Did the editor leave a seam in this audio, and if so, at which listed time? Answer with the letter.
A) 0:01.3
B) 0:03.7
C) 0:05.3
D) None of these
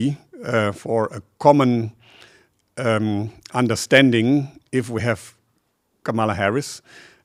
D